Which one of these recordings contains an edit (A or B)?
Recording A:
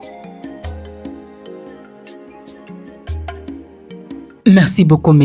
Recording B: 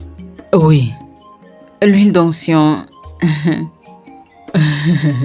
A